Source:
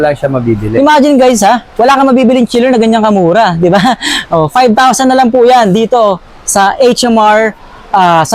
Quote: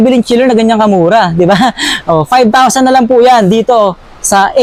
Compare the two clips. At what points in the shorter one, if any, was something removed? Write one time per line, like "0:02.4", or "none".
none

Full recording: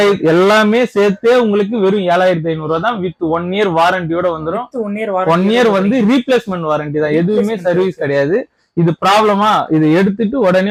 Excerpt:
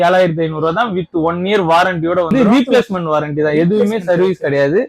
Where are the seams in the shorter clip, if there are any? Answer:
0:02.3

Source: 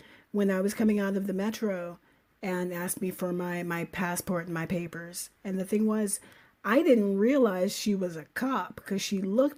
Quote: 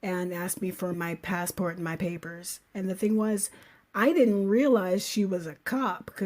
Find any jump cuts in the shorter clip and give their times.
0:00.9

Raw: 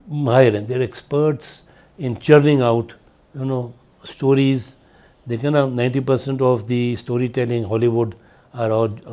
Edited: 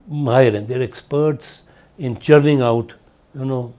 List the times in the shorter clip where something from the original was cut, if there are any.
none

